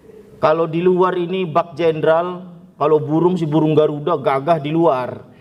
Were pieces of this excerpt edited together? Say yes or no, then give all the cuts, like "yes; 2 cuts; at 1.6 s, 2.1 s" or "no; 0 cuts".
no; 0 cuts